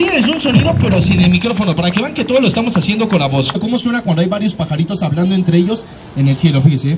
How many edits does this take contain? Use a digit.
1